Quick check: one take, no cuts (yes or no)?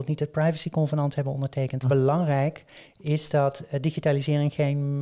no